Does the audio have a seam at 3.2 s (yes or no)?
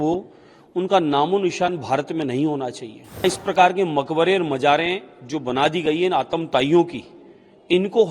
yes